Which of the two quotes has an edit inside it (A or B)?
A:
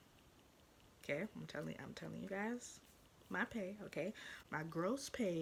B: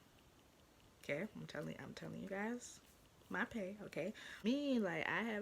B